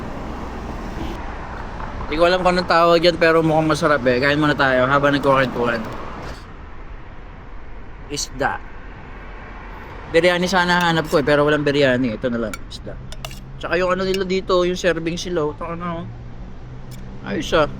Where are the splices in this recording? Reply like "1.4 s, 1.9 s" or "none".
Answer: 1.1 s, 6.4 s